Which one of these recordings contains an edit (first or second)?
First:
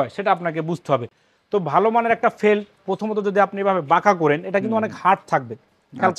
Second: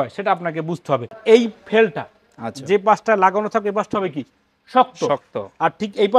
second